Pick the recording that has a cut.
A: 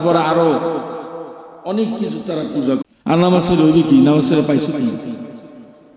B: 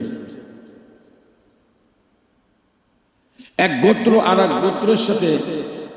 A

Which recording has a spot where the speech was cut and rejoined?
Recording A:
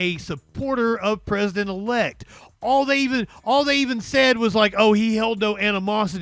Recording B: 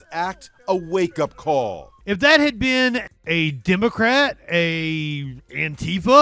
B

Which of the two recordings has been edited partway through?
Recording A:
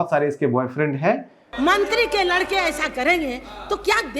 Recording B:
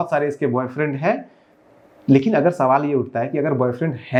A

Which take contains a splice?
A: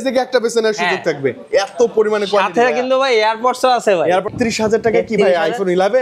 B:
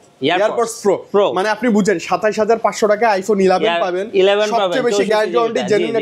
A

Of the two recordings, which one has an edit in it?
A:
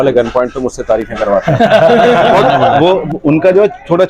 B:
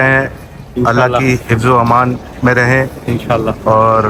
A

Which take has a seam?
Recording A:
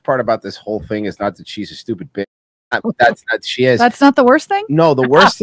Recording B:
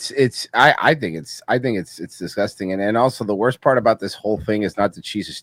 A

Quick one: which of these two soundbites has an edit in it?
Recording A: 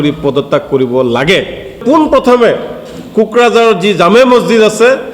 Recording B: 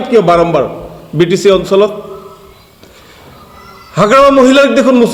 A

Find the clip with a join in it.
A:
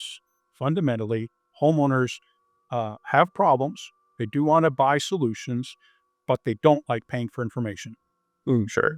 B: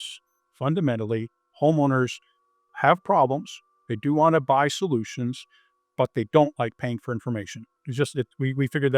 B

